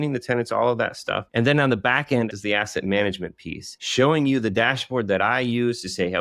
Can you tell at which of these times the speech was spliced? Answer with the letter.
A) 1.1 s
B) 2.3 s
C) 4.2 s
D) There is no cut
B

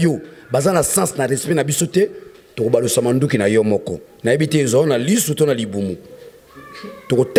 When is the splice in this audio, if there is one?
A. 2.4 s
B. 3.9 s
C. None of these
C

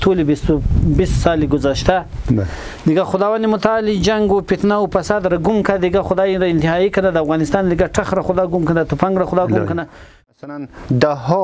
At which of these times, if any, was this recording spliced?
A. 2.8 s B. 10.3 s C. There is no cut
B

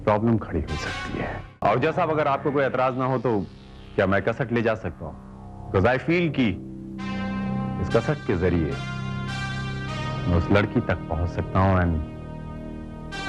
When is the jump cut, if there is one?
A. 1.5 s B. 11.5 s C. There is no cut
A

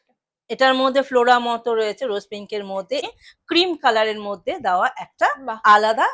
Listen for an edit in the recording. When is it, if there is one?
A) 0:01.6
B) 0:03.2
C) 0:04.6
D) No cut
D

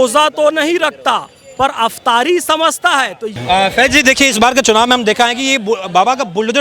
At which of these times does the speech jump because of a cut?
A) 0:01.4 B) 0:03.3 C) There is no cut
B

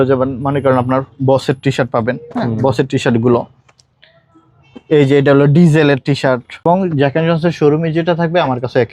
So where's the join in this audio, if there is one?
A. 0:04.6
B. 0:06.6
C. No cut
B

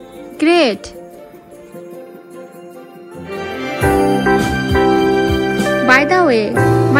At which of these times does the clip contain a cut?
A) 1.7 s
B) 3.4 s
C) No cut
C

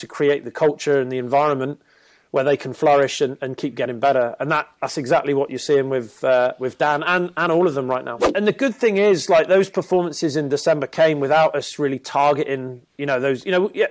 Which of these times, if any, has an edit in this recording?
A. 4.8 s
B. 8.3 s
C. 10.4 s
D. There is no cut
B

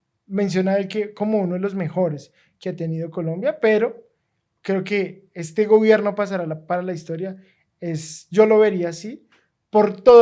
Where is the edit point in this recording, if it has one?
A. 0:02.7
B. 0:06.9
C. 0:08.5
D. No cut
D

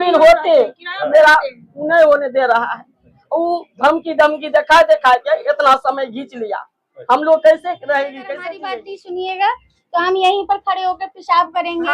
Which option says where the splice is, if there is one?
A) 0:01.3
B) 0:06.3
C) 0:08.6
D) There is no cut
C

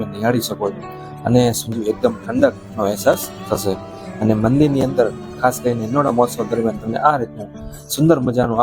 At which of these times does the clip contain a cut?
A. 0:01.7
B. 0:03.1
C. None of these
A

